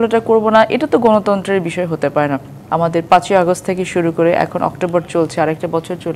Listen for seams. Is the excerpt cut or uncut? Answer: cut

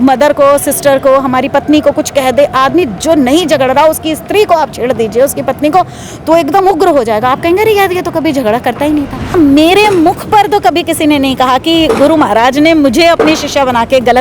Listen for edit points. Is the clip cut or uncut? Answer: cut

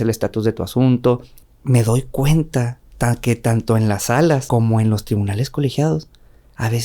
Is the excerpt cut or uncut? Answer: cut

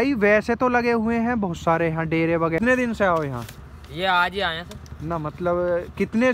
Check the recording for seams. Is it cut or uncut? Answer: cut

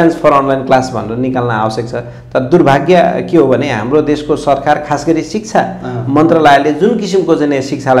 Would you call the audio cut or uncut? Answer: uncut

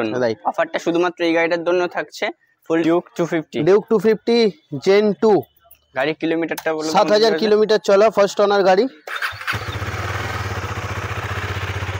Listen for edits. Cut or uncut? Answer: cut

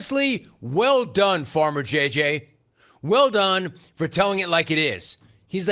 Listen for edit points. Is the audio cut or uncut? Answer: uncut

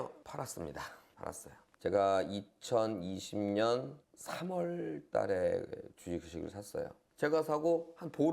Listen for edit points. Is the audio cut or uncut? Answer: cut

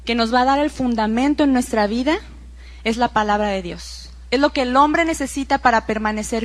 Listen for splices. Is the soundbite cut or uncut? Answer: cut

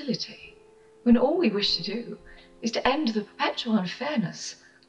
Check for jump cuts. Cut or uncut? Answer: uncut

